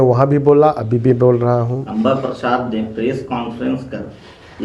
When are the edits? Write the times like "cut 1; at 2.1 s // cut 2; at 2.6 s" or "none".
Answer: cut 1; at 1.7 s